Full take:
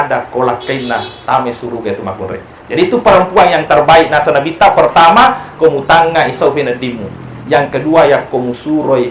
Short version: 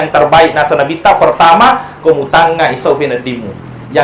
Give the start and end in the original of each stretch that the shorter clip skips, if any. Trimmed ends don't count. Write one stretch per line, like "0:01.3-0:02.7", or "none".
none